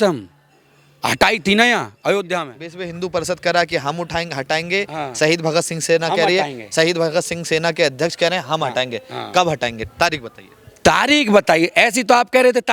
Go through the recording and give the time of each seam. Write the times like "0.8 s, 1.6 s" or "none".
none